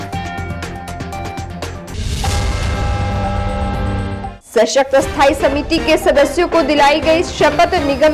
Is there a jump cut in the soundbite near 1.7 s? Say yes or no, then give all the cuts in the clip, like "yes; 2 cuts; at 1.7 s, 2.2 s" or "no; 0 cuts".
yes; 1 cut; at 1.7 s